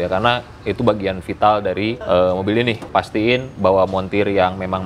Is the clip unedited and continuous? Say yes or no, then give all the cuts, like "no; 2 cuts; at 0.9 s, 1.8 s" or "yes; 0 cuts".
no; 2 cuts; at 2.0 s, 2.8 s